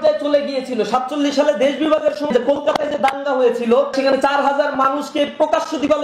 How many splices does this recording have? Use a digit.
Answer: 2